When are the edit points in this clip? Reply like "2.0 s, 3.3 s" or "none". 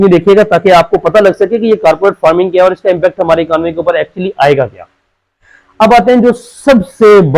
none